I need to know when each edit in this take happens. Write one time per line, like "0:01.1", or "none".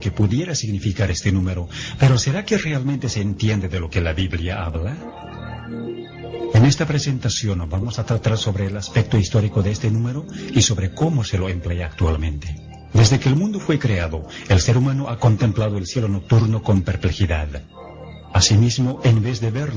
0:11.1